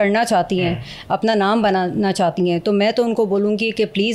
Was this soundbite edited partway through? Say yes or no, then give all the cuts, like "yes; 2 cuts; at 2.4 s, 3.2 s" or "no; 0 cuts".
no; 0 cuts